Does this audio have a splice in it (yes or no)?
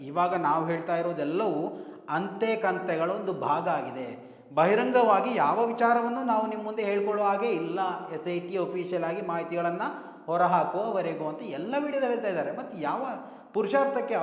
no